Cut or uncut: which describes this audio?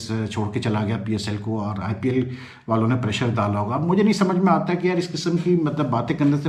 uncut